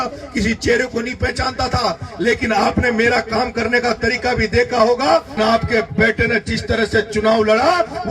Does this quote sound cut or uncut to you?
cut